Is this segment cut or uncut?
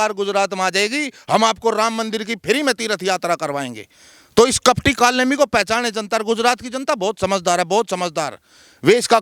uncut